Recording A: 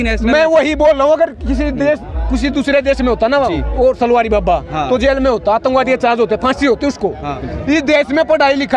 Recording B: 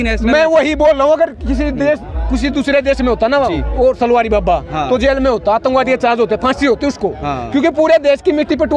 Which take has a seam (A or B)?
A